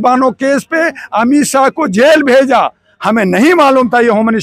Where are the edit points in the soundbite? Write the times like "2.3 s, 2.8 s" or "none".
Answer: none